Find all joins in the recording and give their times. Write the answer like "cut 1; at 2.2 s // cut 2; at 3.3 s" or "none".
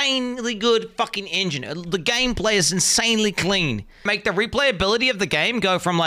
cut 1; at 4.1 s